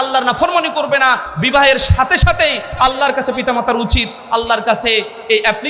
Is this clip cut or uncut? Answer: cut